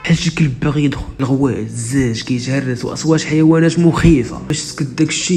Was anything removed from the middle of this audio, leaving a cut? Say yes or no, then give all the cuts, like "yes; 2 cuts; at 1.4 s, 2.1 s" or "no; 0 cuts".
yes; 2 cuts; at 1.1 s, 4.4 s